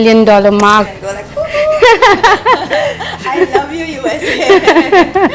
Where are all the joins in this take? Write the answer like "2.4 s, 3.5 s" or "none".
0.9 s